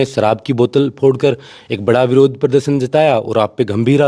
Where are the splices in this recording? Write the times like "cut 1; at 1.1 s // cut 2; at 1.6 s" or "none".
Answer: none